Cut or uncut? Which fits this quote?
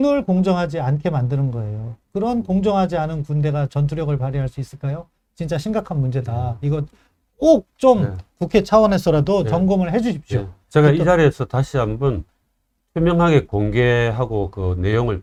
uncut